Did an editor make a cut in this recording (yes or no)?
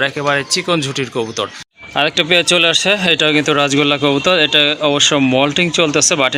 yes